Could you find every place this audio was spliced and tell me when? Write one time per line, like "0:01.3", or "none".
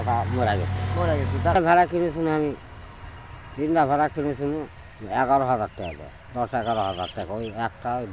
0:01.6